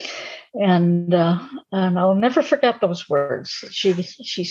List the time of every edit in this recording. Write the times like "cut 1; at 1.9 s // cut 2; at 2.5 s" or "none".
none